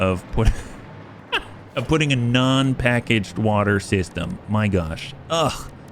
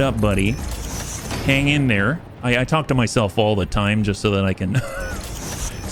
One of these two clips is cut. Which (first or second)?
first